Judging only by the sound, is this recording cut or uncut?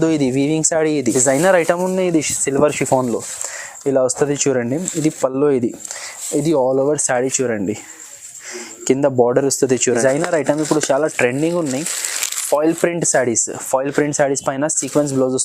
cut